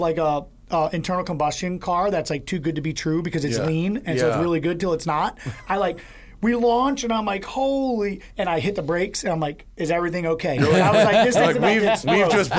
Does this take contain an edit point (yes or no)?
no